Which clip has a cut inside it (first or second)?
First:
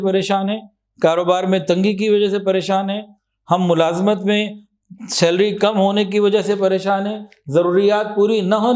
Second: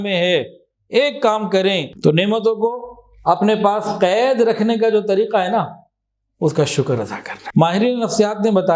second